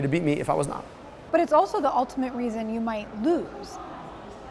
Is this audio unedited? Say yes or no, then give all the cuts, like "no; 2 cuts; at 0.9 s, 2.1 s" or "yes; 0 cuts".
yes; 0 cuts